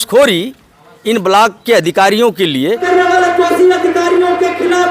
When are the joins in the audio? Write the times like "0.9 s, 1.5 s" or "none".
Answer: 2.8 s